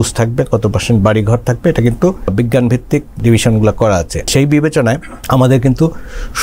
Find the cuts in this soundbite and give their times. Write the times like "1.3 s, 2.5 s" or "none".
2.3 s, 3.2 s, 4.3 s, 5.1 s

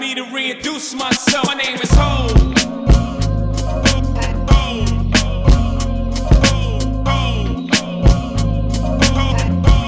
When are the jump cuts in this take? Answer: none

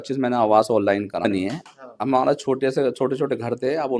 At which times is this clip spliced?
1.2 s

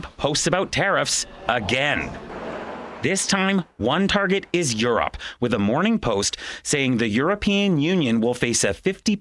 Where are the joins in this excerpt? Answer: none

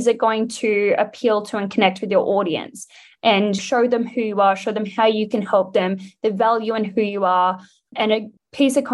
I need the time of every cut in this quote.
3.6 s, 8.0 s

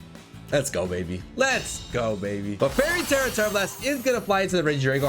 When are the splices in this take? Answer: 2.5 s

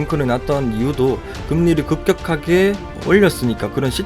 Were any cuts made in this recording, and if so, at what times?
none

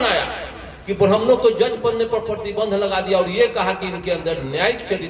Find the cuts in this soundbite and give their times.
none

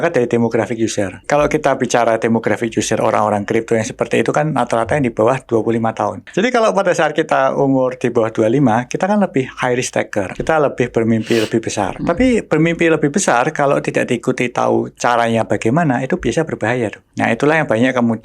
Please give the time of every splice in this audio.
1.2 s, 6.2 s, 10.3 s, 11.9 s, 17.0 s

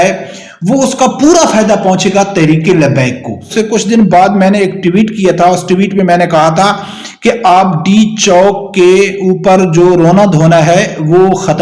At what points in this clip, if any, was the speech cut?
3.5 s

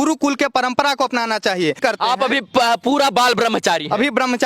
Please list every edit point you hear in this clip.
1.8 s

